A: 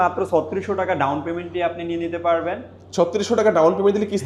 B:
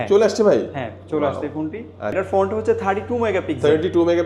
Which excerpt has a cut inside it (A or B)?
B